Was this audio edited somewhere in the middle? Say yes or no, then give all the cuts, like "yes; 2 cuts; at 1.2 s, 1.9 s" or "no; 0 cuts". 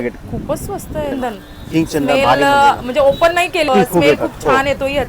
yes; 2 cuts; at 1.1 s, 3.7 s